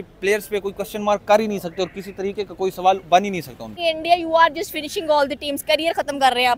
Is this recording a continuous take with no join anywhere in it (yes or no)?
no